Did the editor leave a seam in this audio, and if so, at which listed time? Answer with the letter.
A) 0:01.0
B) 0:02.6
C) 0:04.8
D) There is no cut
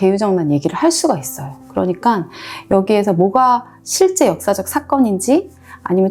D